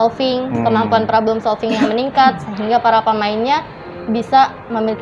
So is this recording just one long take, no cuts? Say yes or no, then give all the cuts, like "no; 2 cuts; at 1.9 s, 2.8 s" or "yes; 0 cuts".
yes; 0 cuts